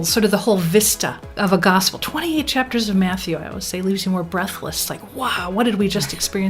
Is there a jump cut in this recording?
yes; 1 cut; at 4.9 s

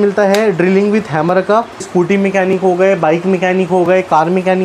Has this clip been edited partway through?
yes; 1 cut; at 1.9 s

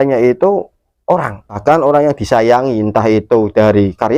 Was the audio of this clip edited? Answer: yes; 1 cut; at 1.6 s

